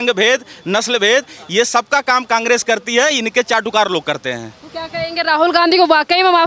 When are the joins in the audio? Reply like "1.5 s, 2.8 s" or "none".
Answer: none